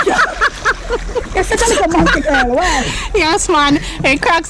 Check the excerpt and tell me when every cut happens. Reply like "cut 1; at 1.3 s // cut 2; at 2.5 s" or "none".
none

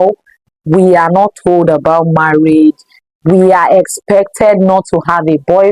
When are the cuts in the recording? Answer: none

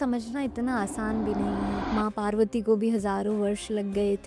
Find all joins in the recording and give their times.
cut 1; at 1.8 s

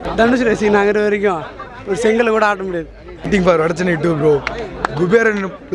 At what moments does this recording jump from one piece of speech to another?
none

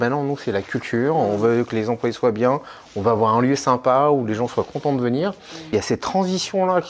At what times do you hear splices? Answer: cut 1; at 5.7 s

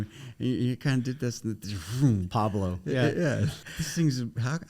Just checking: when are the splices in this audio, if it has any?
cut 1; at 3.6 s

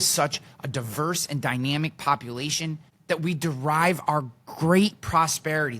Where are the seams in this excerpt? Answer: cut 1; at 2.9 s

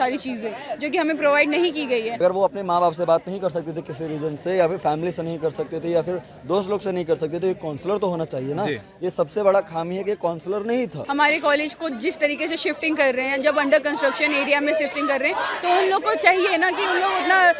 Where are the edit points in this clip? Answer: cut 1; at 2.2 s // cut 2; at 11.0 s

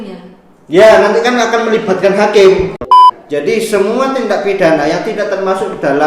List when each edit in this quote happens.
cut 1; at 2.9 s

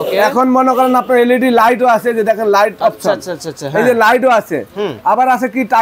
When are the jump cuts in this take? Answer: none

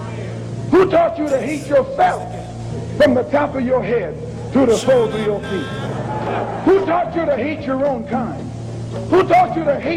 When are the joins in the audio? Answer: none

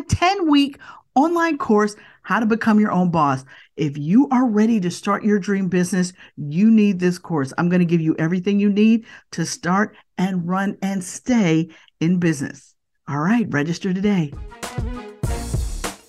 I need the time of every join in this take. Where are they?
cut 1; at 14.4 s

